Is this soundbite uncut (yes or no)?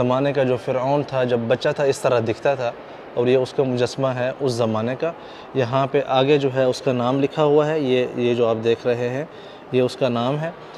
yes